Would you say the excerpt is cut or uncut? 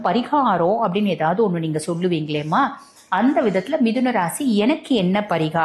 uncut